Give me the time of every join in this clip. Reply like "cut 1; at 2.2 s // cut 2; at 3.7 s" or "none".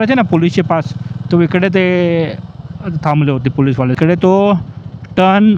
cut 1; at 4.0 s